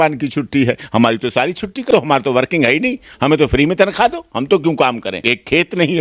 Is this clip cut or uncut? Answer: cut